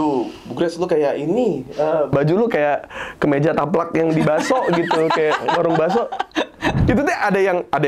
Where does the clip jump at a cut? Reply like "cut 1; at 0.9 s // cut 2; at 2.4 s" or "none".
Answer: cut 1; at 6.8 s